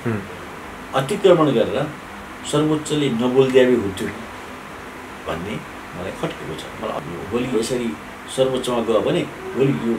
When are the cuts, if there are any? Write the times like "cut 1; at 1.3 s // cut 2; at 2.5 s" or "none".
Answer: cut 1; at 7.0 s

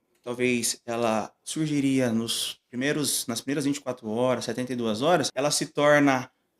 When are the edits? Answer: cut 1; at 5.3 s

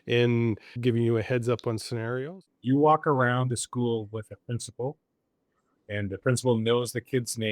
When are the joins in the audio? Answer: cut 1; at 2.4 s

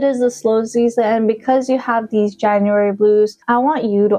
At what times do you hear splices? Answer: none

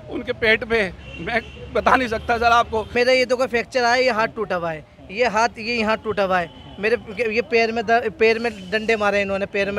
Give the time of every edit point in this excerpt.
cut 1; at 2.9 s

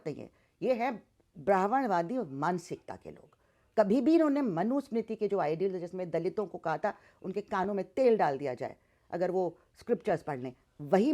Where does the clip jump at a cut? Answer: none

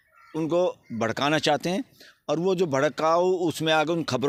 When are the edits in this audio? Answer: none

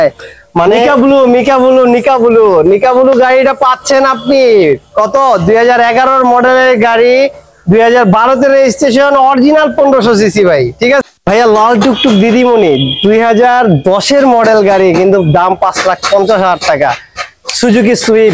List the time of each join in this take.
cut 1; at 0.9 s // cut 2; at 11.0 s

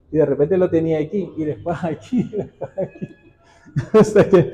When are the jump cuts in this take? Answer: none

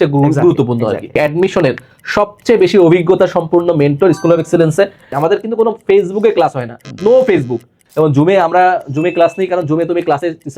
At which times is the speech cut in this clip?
cut 1; at 1.2 s // cut 2; at 5.2 s // cut 3; at 7.8 s

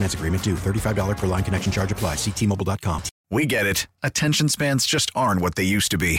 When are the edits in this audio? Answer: cut 1; at 3.1 s

